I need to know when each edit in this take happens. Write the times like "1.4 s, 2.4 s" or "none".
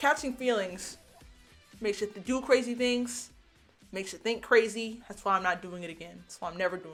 none